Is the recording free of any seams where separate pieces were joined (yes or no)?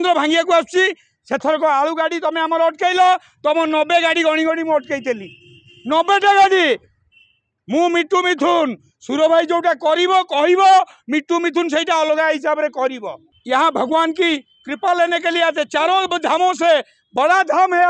no